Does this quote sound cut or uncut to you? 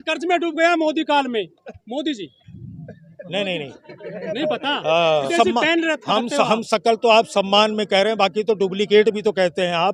cut